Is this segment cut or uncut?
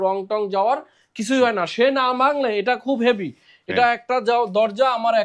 uncut